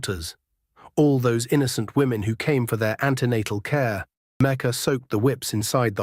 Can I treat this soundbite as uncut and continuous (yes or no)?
no